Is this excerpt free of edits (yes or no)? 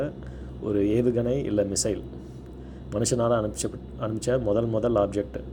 yes